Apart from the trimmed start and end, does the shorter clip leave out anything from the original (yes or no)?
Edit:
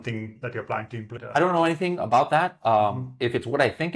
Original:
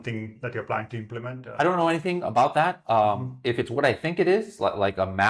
yes